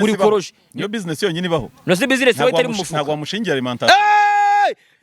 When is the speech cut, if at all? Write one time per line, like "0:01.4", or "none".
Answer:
none